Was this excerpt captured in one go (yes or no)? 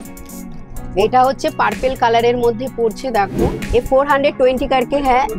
no